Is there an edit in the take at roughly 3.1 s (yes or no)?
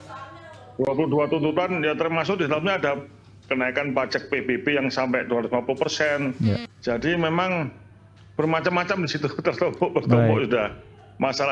no